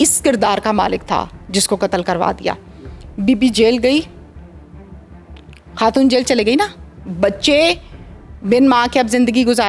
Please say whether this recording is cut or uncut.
uncut